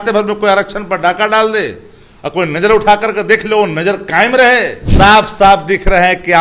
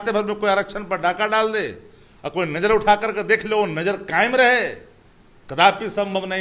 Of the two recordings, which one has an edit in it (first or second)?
first